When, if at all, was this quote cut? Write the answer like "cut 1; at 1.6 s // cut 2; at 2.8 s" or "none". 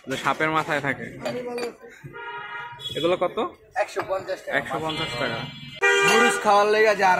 cut 1; at 5.7 s